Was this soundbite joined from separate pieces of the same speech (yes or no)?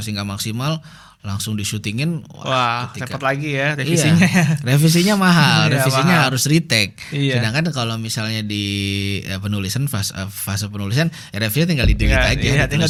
no